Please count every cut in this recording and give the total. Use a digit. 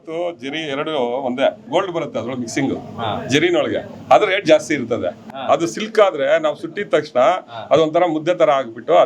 2